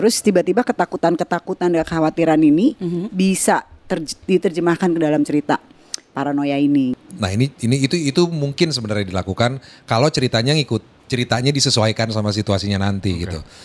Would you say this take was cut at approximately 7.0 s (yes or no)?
yes